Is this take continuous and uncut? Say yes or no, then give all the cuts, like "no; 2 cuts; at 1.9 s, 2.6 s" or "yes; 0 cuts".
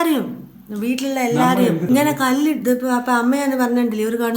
no; 1 cut; at 1.8 s